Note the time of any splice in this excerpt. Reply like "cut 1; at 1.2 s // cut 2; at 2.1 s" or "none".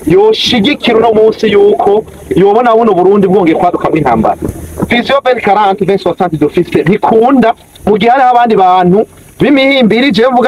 cut 1; at 4.7 s

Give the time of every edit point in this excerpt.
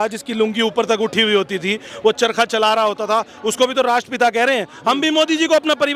none

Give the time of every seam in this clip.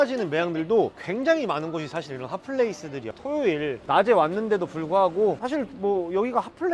cut 1; at 3.2 s // cut 2; at 5.4 s

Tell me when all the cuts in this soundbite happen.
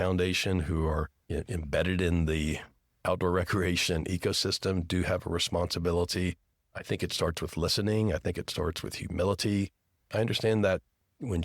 cut 1; at 10.0 s

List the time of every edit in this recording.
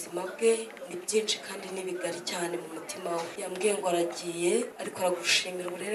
cut 1; at 3.3 s // cut 2; at 4.8 s

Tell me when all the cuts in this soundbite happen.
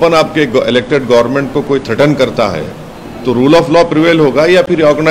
none

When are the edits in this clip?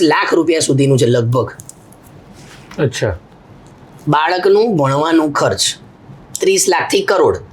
none

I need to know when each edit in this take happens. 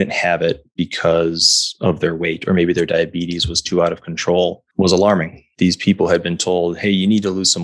cut 1; at 4.6 s // cut 2; at 5.4 s

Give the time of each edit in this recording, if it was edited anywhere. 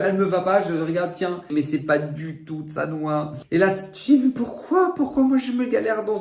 cut 1; at 1.5 s // cut 2; at 3.4 s

